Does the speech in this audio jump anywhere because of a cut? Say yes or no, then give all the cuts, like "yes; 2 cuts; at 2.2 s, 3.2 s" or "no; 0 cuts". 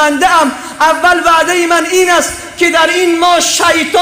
no; 0 cuts